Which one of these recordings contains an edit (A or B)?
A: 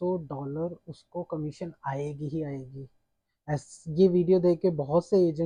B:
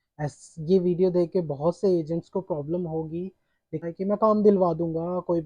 B